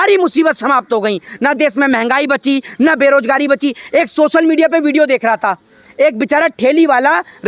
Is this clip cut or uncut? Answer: uncut